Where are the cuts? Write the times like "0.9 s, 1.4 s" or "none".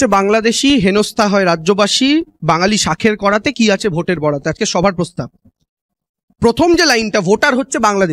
none